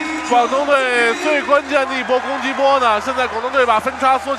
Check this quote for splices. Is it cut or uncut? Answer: uncut